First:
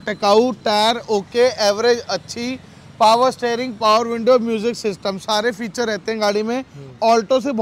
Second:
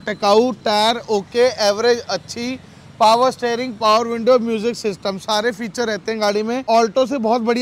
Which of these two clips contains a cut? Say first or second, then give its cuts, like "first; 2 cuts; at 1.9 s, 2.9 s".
second; 1 cut; at 6.6 s